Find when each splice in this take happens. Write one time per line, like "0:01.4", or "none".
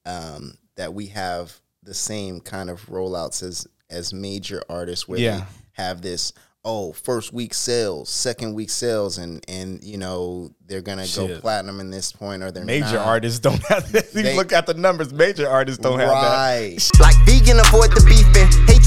0:16.8